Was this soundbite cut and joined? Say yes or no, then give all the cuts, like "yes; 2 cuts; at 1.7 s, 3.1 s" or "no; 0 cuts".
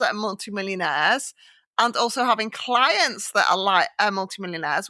no; 0 cuts